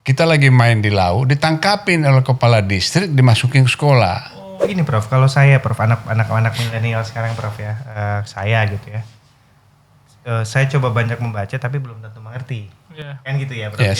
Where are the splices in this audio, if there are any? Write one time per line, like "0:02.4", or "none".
0:04.6

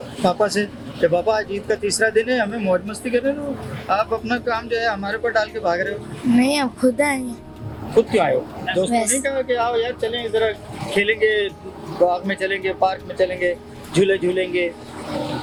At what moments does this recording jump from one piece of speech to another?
none

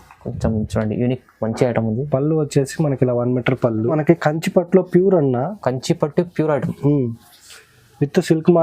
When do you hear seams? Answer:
0:03.9

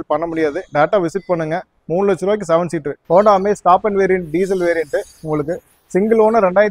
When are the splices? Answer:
0:02.9

